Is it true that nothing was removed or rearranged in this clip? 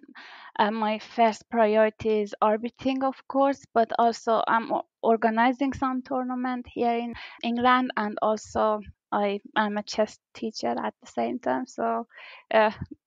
no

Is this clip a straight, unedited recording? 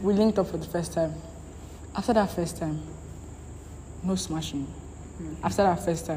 yes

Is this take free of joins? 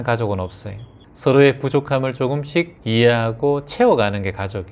no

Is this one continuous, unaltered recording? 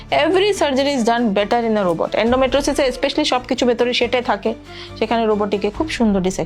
yes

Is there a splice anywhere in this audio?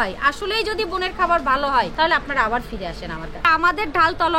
yes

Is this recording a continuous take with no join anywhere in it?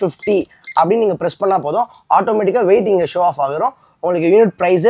yes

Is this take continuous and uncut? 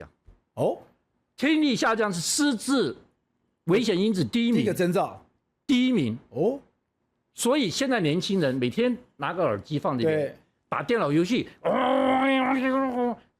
yes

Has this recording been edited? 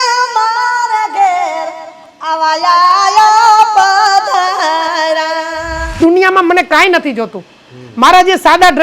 yes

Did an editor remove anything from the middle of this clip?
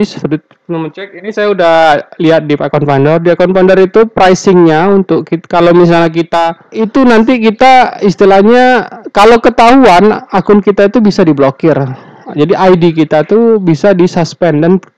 yes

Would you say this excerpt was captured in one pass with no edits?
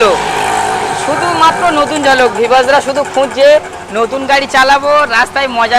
yes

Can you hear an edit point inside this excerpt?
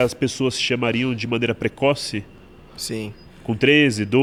no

